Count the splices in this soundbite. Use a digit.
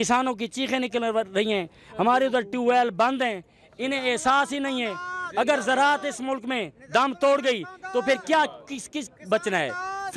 0